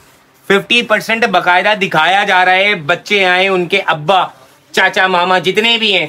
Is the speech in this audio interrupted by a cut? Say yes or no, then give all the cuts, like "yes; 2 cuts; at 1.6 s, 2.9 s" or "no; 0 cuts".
no; 0 cuts